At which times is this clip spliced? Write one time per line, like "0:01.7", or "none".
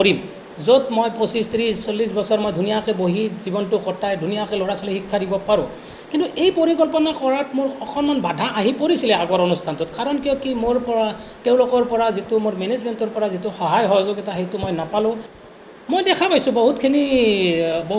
0:15.3